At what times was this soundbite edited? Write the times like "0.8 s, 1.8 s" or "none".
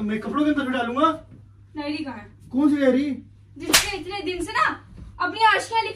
none